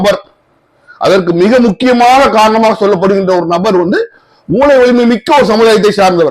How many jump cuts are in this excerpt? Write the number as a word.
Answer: zero